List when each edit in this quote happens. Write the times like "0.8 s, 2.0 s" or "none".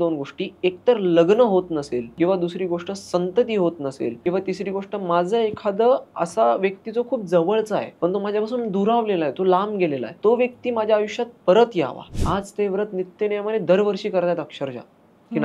2.1 s, 4.2 s, 7.9 s, 10.1 s, 12.1 s